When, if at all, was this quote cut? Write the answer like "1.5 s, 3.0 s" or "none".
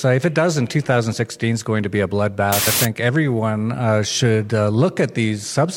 2.7 s